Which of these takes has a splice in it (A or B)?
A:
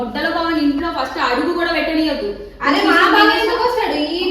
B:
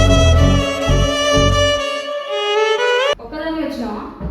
B